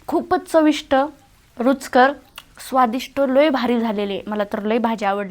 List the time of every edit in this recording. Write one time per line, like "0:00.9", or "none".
none